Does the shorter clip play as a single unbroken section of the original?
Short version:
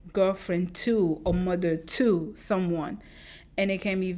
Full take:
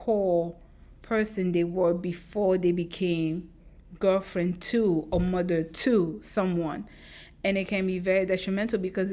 yes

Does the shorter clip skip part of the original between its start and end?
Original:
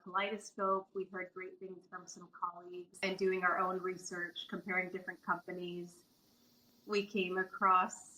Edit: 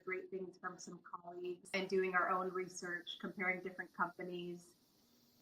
no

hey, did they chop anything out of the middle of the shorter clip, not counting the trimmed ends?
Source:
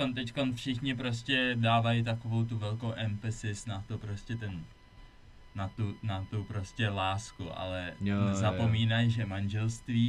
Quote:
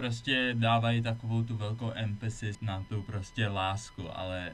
yes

